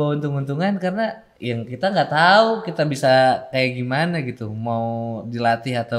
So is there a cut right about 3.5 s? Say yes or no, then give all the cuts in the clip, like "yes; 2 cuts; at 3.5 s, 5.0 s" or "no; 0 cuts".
no; 1 cut; at 1.3 s